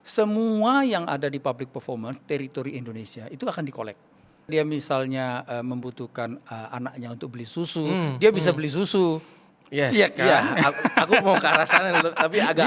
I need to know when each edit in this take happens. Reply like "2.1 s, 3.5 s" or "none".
4.5 s